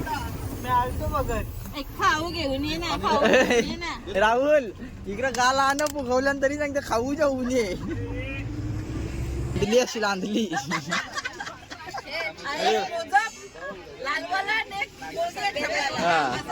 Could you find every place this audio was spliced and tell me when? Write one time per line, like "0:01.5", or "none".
0:09.6